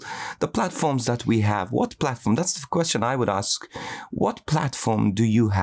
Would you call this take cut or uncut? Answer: uncut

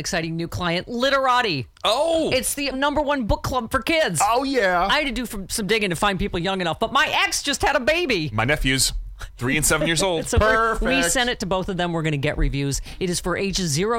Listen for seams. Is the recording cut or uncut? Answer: uncut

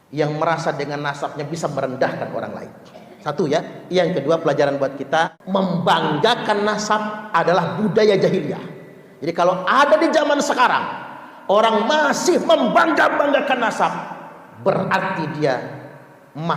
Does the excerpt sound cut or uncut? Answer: cut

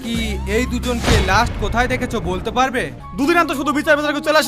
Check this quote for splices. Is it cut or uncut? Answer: cut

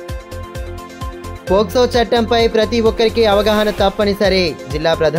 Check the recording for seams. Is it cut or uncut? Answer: uncut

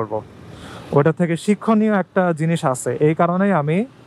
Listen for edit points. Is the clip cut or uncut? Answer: uncut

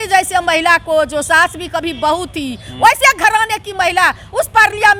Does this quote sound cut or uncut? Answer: uncut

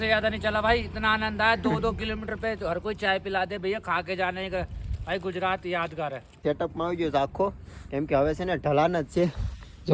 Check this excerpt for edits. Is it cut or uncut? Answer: cut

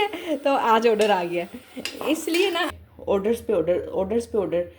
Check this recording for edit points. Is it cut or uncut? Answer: cut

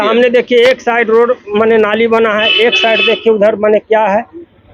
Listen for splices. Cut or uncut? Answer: uncut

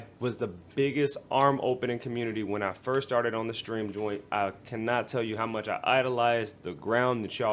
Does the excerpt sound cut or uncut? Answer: uncut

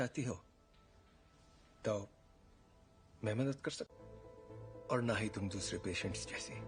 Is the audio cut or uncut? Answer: uncut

